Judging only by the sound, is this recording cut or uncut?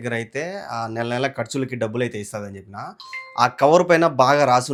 uncut